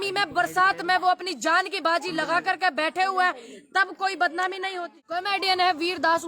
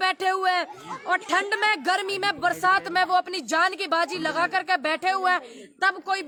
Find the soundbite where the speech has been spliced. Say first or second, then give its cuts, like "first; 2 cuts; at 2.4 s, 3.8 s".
first; 1 cut; at 5.2 s